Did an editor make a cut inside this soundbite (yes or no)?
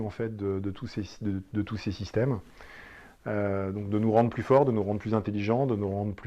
no